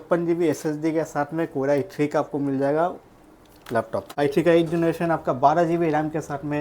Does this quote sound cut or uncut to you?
cut